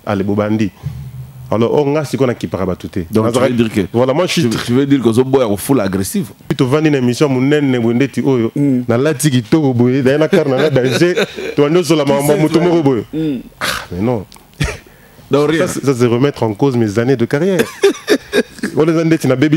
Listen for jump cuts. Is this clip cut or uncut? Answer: cut